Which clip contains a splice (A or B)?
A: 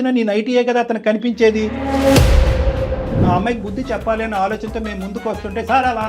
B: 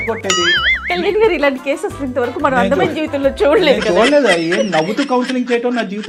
A